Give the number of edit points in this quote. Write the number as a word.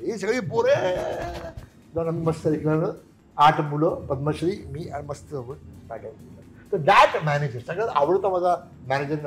zero